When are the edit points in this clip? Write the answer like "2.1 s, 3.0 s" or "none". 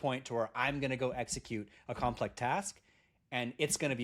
none